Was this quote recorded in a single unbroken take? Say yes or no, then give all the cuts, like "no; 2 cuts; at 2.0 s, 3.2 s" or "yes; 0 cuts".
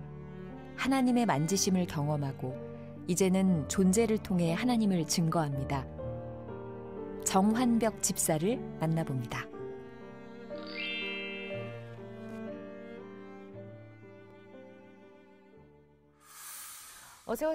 yes; 0 cuts